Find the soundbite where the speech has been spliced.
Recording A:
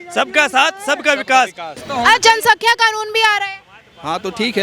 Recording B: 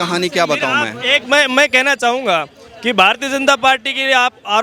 A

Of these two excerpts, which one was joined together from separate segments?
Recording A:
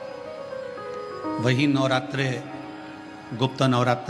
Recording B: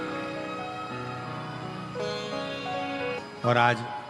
B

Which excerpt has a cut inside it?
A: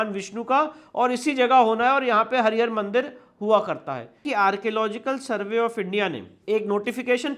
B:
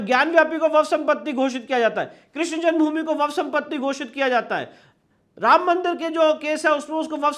A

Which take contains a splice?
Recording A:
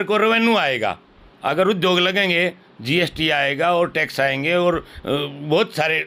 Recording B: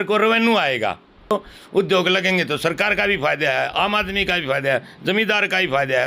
B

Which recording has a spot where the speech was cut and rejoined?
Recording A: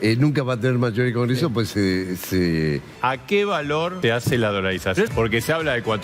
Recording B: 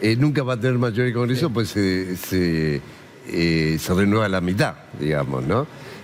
A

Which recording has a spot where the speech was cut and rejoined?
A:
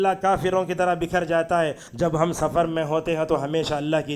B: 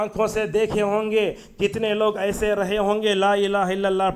A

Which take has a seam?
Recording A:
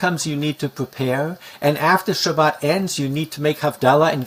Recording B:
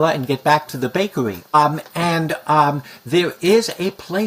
B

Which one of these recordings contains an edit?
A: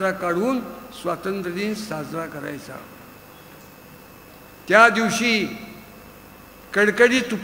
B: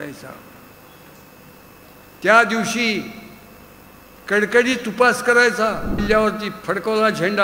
B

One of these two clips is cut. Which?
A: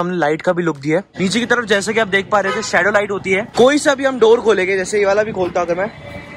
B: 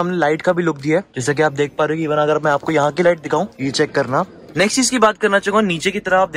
A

